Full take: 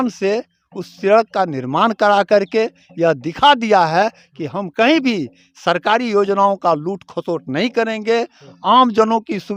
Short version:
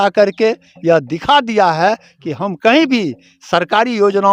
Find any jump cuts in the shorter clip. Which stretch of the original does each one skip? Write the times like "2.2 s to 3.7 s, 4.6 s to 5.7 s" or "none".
none